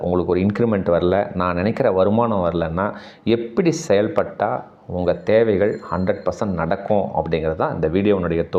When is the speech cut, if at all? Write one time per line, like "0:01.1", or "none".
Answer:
none